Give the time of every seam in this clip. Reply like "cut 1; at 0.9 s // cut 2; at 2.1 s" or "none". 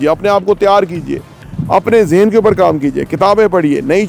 none